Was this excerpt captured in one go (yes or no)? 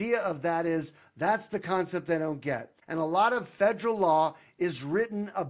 no